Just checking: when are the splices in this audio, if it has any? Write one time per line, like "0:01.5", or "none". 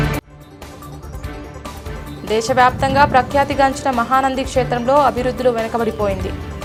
none